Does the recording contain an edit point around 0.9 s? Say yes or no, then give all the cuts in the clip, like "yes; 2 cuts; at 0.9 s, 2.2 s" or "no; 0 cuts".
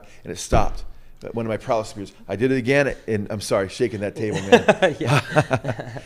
no; 0 cuts